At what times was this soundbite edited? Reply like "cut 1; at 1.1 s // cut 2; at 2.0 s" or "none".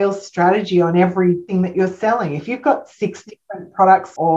cut 1; at 1.5 s